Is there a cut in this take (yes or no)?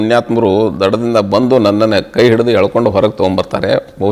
no